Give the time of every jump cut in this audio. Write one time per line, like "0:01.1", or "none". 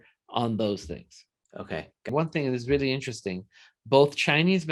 0:02.1

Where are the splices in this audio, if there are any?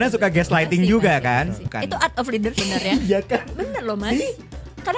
0:01.6
0:02.6

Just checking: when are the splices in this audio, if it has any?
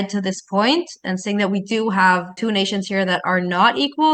none

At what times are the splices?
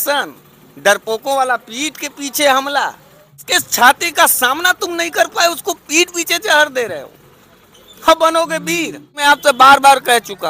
0:03.4
0:09.2

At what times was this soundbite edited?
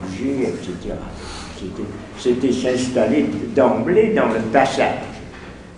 0:01.7

